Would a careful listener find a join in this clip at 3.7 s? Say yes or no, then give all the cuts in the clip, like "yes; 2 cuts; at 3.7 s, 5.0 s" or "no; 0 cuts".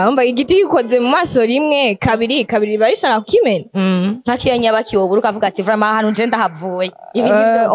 yes; 1 cut; at 3.7 s